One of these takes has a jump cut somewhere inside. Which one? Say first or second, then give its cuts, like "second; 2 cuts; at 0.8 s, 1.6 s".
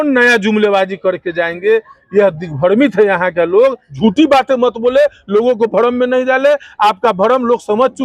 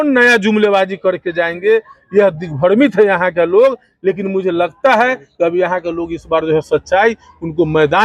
first; 1 cut; at 3.9 s